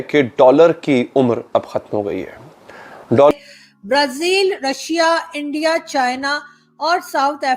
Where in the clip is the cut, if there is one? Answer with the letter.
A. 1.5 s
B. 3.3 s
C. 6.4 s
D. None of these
B